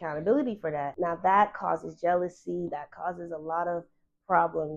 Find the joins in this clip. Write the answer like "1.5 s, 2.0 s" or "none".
0.9 s